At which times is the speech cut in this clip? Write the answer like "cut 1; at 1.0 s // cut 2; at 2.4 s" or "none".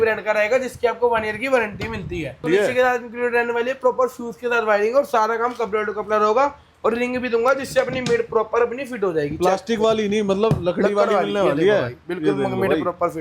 cut 1; at 2.4 s